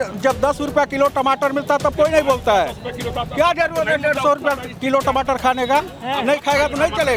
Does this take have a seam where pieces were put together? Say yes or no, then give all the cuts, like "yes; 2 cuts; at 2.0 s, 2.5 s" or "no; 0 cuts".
no; 0 cuts